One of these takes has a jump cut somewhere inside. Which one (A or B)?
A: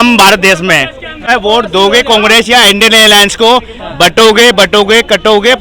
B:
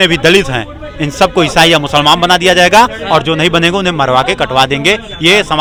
A